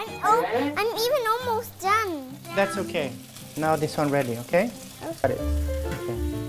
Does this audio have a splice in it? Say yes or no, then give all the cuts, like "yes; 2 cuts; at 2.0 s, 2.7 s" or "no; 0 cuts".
yes; 1 cut; at 5.2 s